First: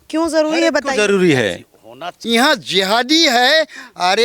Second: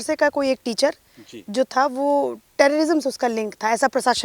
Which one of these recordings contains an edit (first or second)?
first